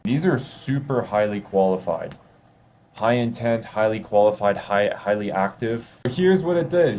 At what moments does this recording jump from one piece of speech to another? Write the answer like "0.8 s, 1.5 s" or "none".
6.1 s